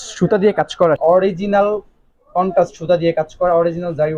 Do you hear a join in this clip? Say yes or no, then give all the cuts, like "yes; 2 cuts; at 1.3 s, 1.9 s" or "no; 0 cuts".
yes; 1 cut; at 1.0 s